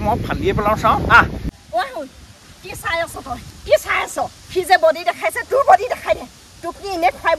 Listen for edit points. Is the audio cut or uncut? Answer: cut